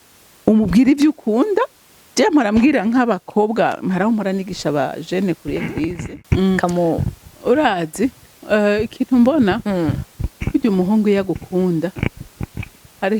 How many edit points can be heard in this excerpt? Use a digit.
1